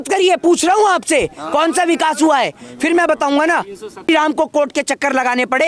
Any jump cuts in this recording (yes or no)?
yes